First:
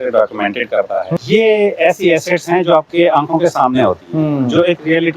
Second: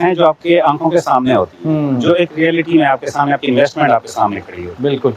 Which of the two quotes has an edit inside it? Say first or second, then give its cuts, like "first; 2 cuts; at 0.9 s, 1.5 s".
first; 1 cut; at 1.1 s